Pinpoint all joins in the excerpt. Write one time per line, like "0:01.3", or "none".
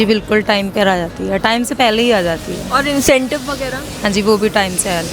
none